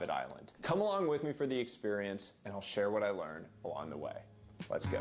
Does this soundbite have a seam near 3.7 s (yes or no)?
yes